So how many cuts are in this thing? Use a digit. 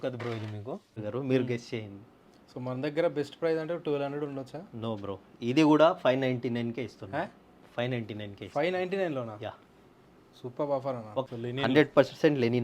2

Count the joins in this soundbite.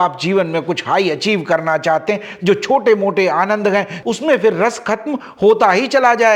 2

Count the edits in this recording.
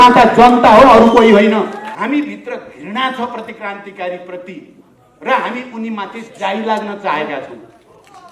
1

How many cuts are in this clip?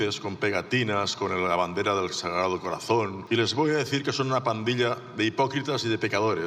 1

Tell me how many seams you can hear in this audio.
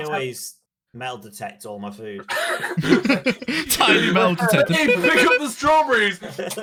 0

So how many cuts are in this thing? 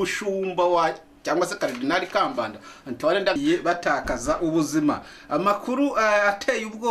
1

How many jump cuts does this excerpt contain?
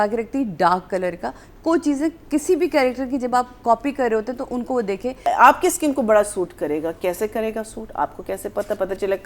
1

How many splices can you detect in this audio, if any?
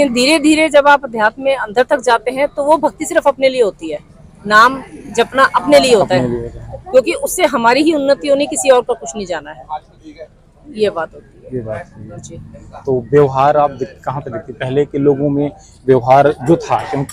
0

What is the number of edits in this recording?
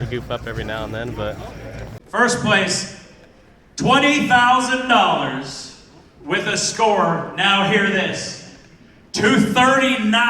1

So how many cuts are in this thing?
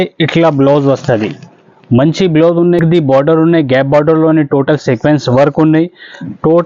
1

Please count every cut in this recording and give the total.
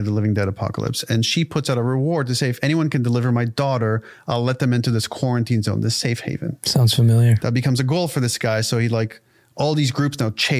0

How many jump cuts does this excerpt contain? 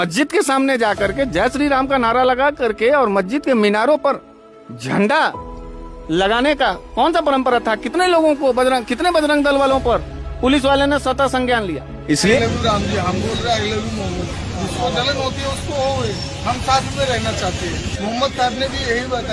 1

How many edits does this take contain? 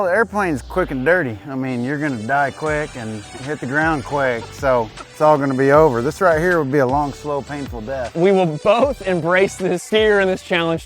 2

